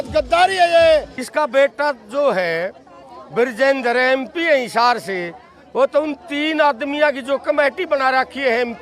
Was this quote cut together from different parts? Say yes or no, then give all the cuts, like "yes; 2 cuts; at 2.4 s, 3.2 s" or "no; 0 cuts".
yes; 1 cut; at 1.2 s